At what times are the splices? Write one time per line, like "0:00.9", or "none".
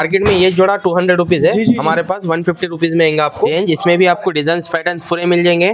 0:03.5